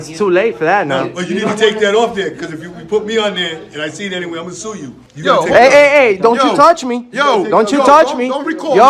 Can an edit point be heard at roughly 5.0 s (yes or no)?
yes